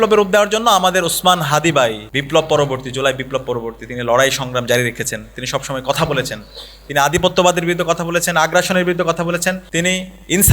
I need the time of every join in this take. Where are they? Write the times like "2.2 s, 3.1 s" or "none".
2.1 s, 9.6 s